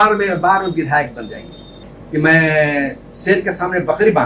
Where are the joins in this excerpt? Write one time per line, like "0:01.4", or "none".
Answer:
0:01.9